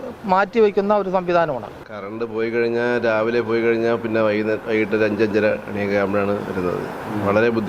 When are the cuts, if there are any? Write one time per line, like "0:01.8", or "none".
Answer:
0:01.8